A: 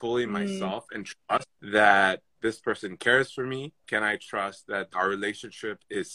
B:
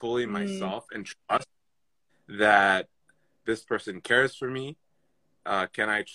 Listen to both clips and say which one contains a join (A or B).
A